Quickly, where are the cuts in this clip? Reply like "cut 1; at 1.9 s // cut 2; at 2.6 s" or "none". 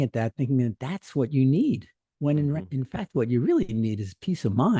none